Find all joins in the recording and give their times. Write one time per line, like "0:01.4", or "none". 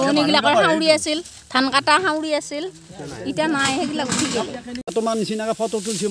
0:04.9